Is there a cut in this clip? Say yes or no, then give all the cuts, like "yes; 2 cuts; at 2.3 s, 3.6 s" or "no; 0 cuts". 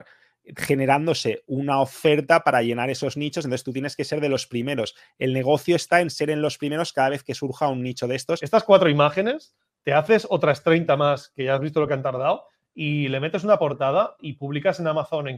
yes; 1 cut; at 8.4 s